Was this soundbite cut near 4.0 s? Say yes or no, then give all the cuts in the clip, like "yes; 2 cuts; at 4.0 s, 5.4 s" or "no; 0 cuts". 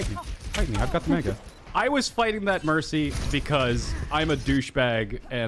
no; 1 cut; at 1.7 s